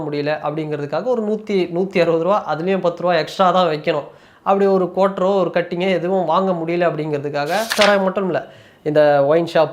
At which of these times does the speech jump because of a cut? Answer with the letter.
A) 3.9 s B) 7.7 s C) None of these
B